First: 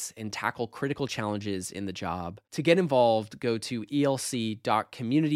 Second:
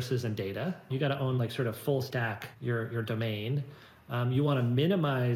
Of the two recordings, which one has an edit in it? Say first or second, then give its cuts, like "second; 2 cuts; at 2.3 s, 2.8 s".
second; 2 cuts; at 0.9 s, 2.5 s